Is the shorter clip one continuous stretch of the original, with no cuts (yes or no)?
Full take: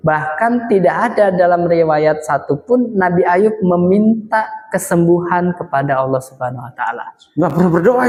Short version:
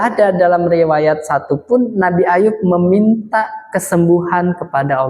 yes